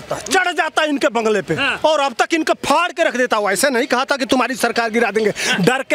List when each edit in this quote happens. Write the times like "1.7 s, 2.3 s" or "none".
1.7 s